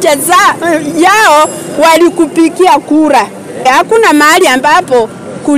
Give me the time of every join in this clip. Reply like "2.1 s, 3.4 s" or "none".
3.7 s